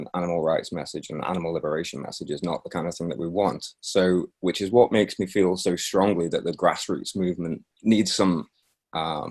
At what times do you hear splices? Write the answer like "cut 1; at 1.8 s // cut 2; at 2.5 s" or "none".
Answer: cut 1; at 7.7 s